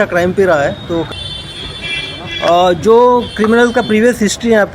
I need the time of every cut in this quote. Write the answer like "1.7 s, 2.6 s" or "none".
1.1 s

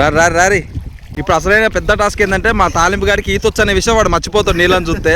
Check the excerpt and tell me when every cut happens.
1.0 s

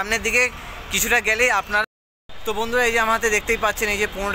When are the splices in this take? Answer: 1.8 s

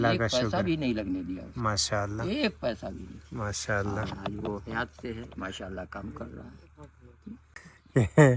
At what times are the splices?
none

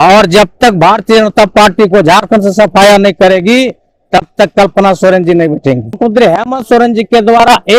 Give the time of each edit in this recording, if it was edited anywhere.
6.0 s

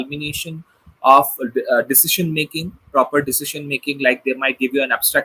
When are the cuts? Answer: none

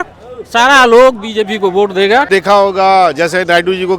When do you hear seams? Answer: 2.3 s

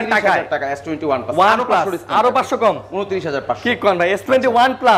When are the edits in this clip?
none

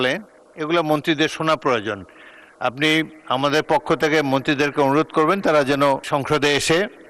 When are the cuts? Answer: 6.0 s

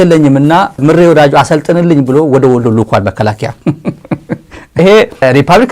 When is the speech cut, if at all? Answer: 3.5 s, 4.8 s

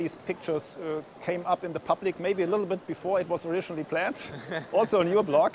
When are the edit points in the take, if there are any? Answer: none

